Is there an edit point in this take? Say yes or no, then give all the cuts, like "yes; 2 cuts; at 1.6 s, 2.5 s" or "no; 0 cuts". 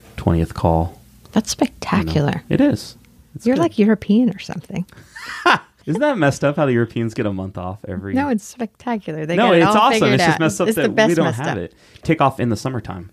yes; 2 cuts; at 5.7 s, 12.0 s